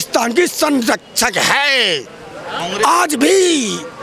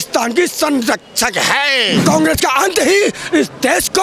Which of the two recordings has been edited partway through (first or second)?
second